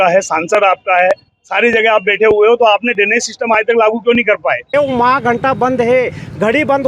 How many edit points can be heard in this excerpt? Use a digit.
1